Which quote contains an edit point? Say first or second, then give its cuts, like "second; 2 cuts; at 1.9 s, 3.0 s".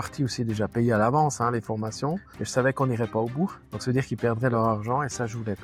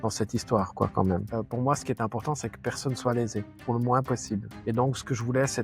second; 1 cut; at 1.3 s